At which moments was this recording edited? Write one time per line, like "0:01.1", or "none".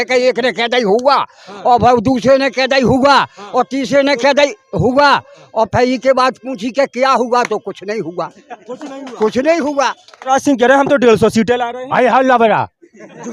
0:10.1

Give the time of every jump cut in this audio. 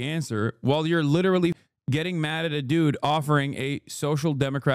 0:01.6

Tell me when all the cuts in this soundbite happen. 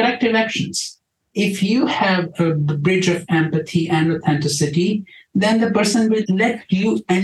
0:01.2
0:06.2

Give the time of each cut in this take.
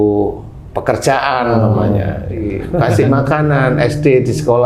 0:02.6

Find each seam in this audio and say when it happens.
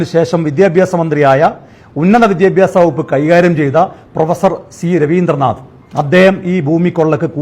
0:05.7

